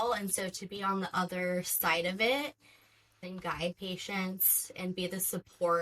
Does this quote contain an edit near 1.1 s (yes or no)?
no